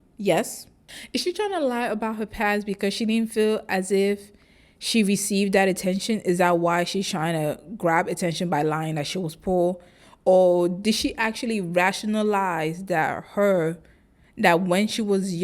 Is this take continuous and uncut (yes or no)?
no